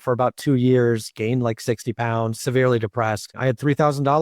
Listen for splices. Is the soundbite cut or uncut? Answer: cut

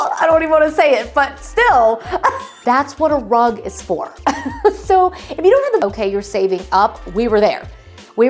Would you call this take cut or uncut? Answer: cut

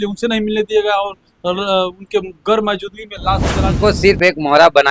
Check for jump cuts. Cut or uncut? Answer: cut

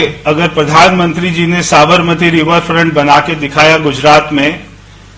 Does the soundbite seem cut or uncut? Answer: uncut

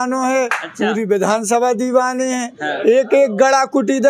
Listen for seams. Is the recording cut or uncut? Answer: uncut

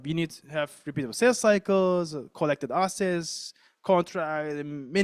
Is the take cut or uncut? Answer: uncut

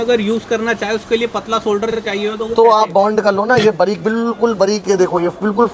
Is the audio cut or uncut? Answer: uncut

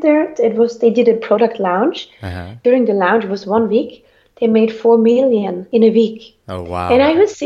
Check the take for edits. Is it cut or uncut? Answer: cut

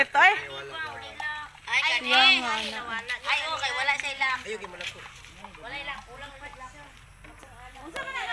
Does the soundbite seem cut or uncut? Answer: uncut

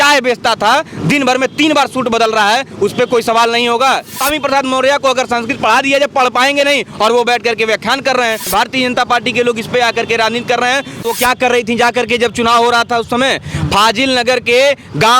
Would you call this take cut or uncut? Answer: cut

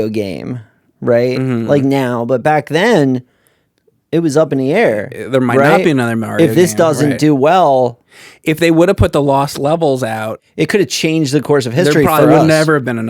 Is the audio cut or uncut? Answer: cut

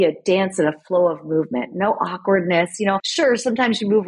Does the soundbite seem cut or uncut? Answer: cut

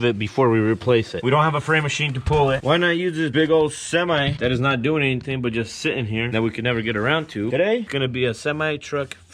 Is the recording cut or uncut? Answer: cut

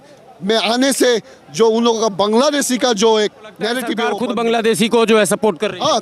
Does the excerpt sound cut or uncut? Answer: cut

